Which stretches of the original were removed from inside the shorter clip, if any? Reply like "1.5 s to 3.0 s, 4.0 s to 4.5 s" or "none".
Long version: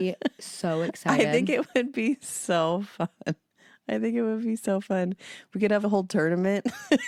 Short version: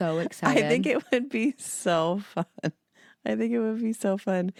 none

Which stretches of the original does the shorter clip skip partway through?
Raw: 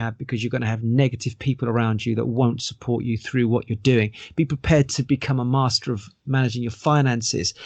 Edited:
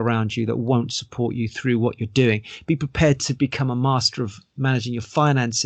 none

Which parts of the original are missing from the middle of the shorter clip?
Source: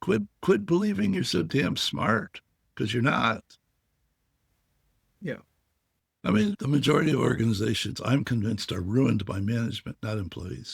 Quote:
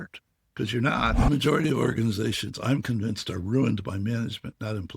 3.4 s to 6.6 s

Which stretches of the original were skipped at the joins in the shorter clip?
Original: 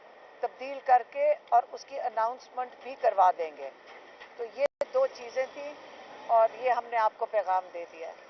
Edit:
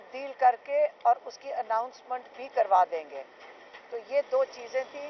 4.7 s to 4.8 s

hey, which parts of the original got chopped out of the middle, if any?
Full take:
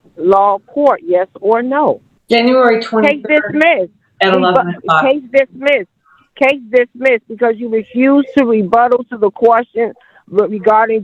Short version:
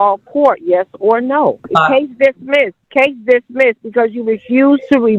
2.0 s to 4.8 s, 5.9 s to 6.2 s

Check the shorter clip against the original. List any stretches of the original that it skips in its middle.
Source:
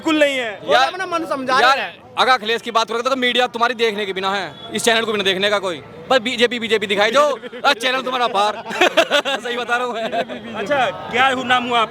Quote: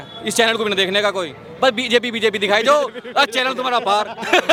none

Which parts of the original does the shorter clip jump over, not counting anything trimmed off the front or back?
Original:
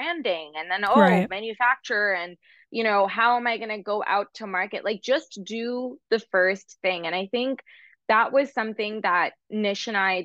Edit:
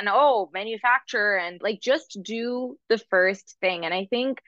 2.3 s to 4.8 s

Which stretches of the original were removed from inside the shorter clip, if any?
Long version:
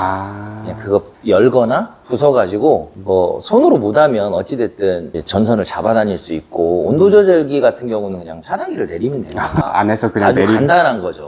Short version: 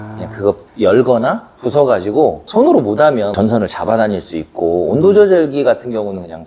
2.9 s to 3.4 s, 4.3 s to 5.3 s

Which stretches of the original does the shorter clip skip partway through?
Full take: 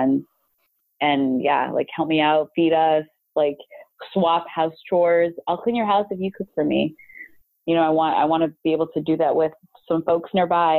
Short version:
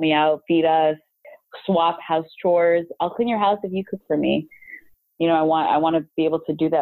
3.2 s to 3.6 s

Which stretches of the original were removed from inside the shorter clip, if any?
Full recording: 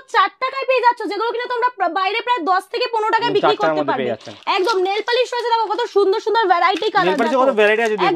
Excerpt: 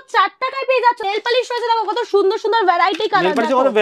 1.0 s to 4.9 s

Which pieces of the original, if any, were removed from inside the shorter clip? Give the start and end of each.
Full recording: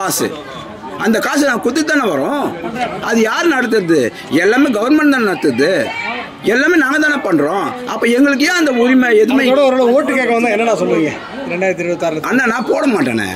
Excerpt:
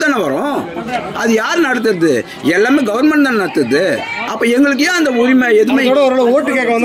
6.1 s to 7.8 s

